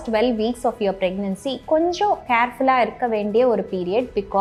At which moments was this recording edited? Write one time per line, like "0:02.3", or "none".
none